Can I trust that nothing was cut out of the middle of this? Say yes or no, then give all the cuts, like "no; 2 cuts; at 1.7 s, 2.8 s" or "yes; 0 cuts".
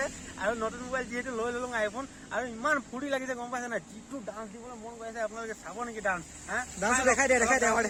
yes; 0 cuts